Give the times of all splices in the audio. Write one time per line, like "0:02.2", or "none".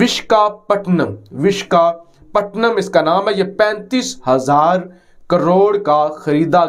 none